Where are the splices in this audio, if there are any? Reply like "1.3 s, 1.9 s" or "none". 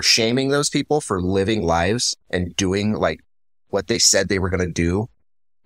none